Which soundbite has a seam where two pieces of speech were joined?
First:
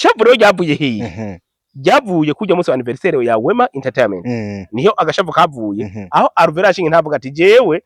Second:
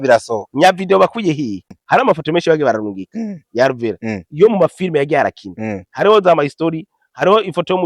second; 1 cut; at 1.7 s

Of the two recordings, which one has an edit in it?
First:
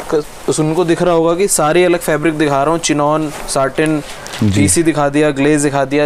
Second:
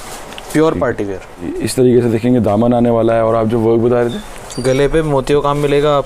second; 1 cut; at 1.7 s

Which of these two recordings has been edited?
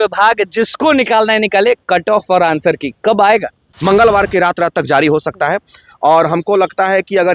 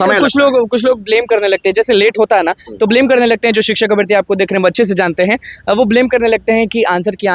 first; 1 cut; at 3.7 s

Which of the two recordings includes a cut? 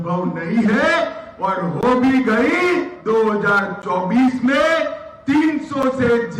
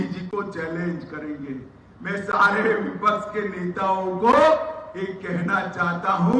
first; 1 cut; at 2.9 s

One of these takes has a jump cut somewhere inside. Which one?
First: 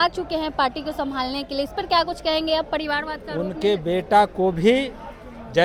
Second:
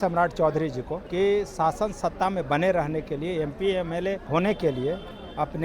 second; 2 cuts; at 1.0 s, 4.2 s

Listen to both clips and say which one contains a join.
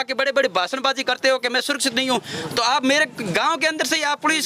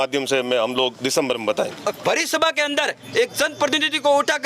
second; 1 cut; at 1.9 s

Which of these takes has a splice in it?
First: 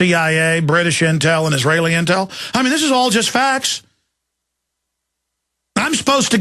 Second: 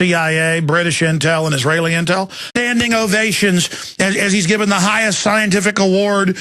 first; 1 cut; at 2.5 s

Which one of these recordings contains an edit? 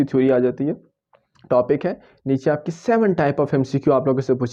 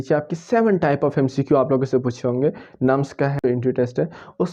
second; 1 cut; at 3.4 s

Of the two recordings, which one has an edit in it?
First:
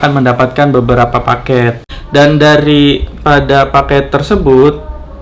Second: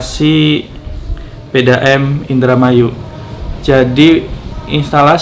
first; 1 cut; at 1.9 s

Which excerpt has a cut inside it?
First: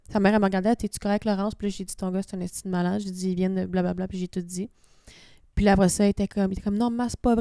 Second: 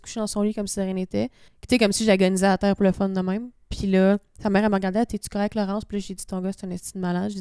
second; 1 cut; at 1.5 s

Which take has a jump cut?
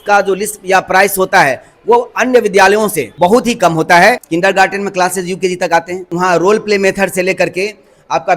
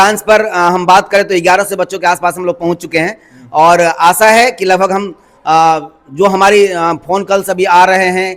first; 3 cuts; at 3.0 s, 4.2 s, 6.1 s

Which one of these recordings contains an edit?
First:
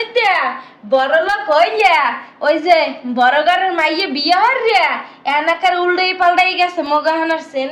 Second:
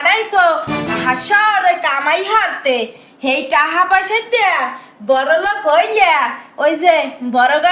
second; 1 cut; at 0.9 s

